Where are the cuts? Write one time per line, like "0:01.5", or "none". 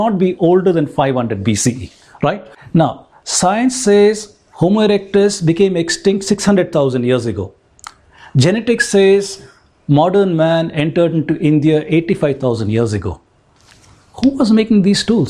0:02.5

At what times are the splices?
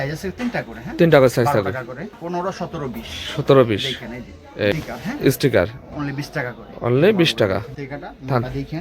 0:02.1
0:04.7
0:07.7

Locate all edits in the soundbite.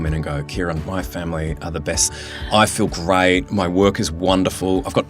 0:02.2

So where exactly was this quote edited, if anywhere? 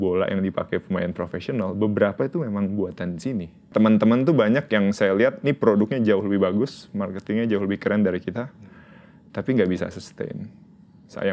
0:03.7

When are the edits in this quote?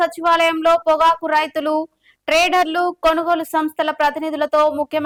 none

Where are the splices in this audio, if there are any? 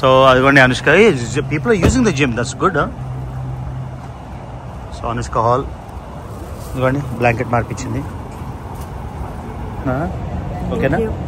0:09.8

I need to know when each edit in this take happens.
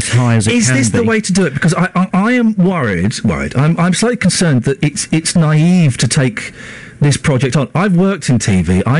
none

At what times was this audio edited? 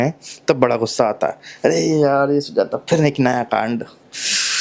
none

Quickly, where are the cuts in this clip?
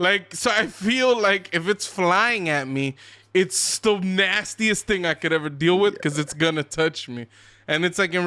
none

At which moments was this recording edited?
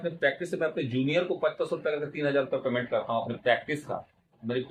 none

